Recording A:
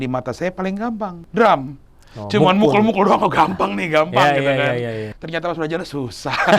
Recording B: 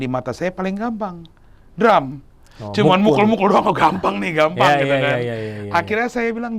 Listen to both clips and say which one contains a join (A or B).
A